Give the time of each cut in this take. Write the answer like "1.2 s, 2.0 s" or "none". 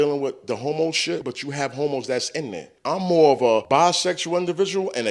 1.2 s, 2.7 s, 3.6 s